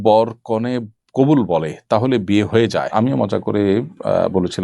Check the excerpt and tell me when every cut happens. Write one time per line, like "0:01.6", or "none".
0:02.9